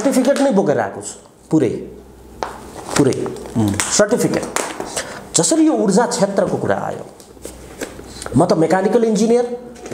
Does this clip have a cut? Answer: no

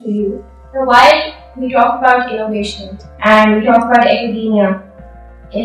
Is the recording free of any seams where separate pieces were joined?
yes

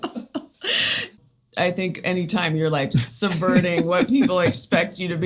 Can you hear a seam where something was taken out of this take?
yes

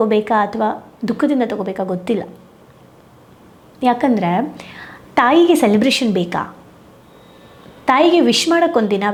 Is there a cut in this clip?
no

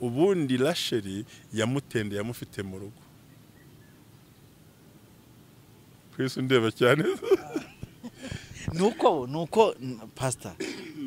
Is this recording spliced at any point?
no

